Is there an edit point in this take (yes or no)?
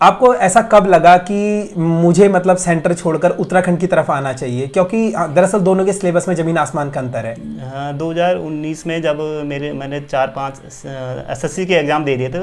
no